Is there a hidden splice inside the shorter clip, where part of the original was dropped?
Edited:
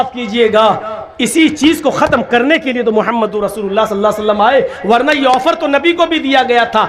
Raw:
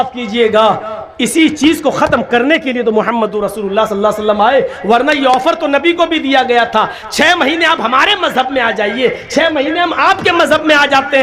no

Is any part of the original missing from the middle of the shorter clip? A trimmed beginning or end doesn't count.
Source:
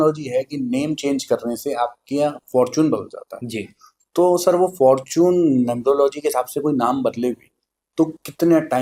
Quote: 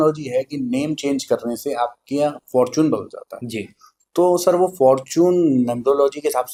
no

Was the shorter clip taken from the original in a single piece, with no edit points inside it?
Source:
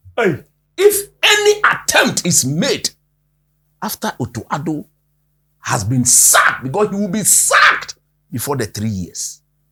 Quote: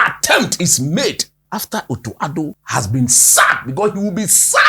no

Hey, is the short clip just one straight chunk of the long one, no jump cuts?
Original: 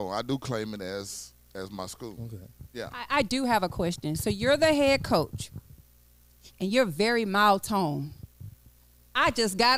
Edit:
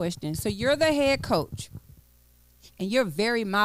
yes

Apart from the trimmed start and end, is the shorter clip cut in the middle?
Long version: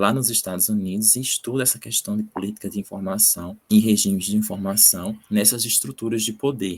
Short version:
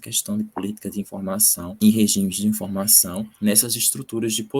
yes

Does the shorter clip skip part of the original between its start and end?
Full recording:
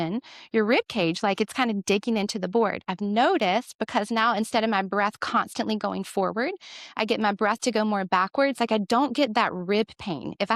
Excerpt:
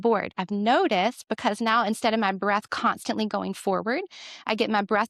no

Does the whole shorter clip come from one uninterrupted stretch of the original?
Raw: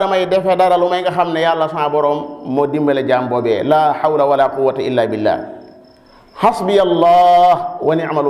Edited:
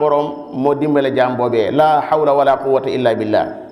yes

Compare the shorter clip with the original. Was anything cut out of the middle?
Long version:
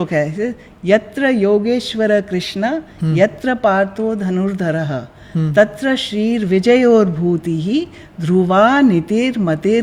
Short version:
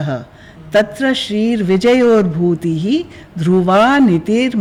no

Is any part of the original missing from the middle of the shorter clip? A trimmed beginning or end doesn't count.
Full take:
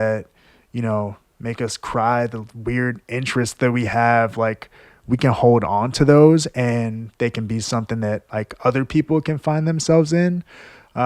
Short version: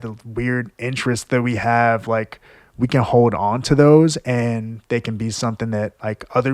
no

